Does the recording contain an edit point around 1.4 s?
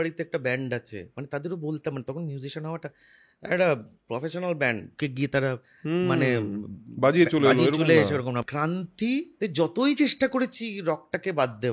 no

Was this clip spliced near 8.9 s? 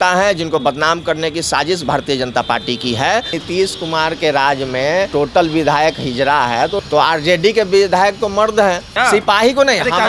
yes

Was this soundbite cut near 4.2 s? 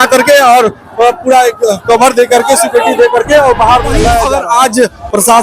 yes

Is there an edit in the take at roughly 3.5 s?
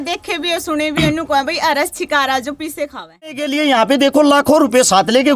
yes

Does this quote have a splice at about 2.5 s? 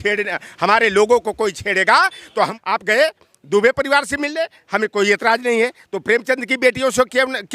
yes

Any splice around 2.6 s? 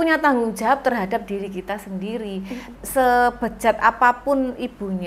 yes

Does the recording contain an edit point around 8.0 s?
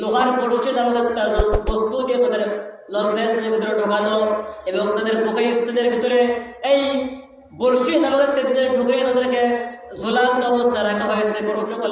no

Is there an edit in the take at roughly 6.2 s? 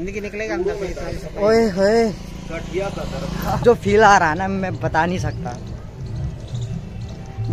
no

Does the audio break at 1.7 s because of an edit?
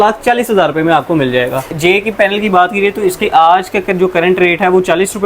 yes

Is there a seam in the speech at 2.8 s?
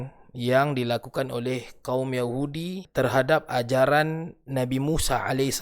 yes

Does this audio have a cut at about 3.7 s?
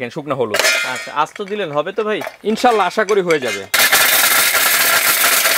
yes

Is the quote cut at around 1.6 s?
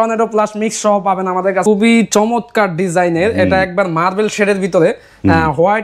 yes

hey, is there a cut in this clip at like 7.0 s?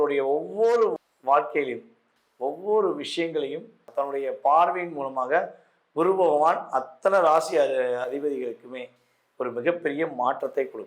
no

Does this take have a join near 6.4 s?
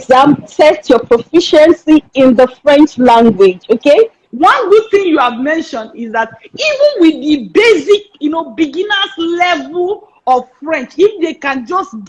no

